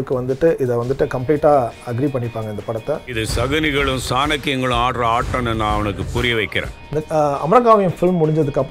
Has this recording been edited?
yes; 2 cuts; at 3.1 s, 6.8 s

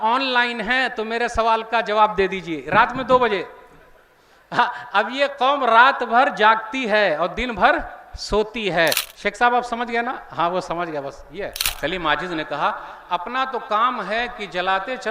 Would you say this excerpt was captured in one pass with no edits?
no; 2 cuts; at 9.1 s, 11.6 s

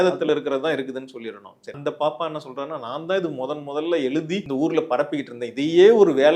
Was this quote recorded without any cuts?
no; 2 cuts; at 1.7 s, 4.4 s

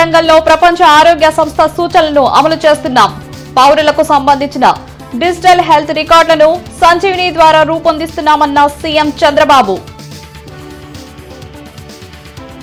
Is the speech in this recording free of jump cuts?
yes; 0 cuts

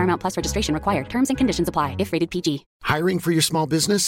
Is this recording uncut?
no; 1 cut; at 2.7 s

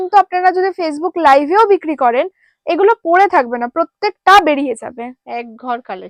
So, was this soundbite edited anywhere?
no; 0 cuts

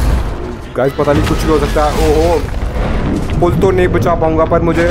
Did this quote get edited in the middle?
no; 0 cuts

